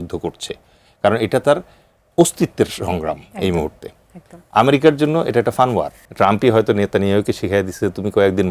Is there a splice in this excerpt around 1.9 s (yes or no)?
no